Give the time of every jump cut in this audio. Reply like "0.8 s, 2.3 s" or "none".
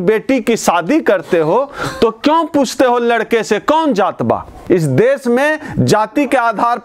4.6 s